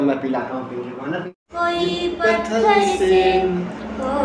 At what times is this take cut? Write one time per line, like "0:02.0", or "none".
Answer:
0:01.2

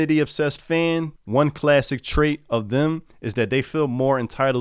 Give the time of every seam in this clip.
0:01.2

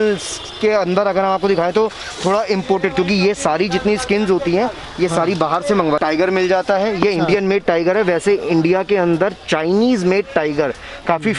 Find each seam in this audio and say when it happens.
0:06.0

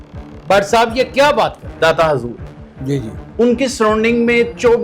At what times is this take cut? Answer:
0:01.7

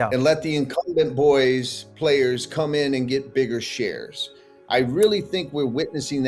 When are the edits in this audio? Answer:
none

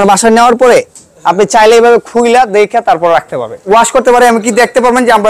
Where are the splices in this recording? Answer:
0:03.7

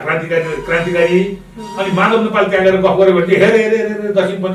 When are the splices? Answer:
none

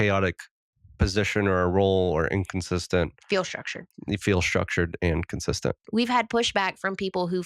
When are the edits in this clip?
0:05.8

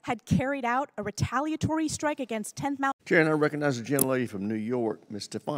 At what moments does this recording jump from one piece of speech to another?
0:03.0

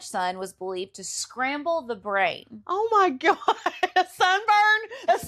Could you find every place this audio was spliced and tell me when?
none

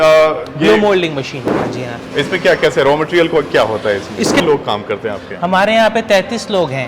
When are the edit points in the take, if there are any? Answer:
0:01.7
0:04.4

